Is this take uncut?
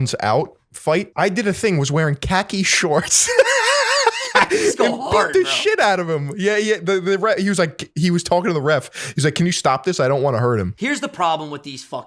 no; 2 cuts; at 1.1 s, 10.7 s

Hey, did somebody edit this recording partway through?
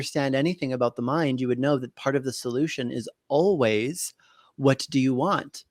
no; 0 cuts

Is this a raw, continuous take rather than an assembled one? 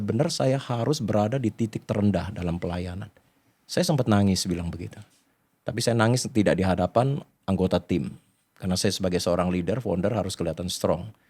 yes; 0 cuts

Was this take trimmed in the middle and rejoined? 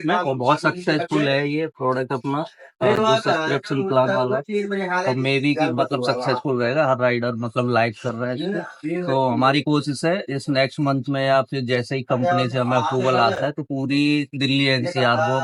no; 0 cuts

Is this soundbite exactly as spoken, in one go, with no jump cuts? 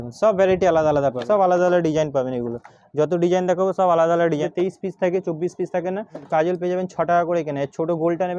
no; 3 cuts; at 1.2 s, 4.5 s, 6.2 s

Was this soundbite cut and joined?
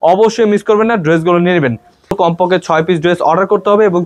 yes; 1 cut; at 2.2 s

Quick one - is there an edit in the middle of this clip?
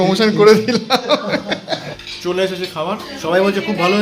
yes; 2 cuts; at 2.1 s, 3.1 s

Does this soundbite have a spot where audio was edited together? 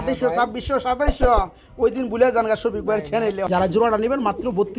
yes; 1 cut; at 3.4 s

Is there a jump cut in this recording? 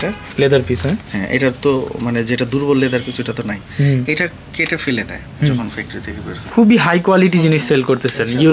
yes; 1 cut; at 6.4 s

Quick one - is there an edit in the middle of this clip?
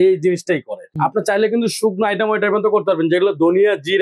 yes; 1 cut; at 0.9 s

